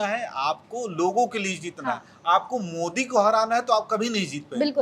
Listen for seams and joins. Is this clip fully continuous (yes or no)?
yes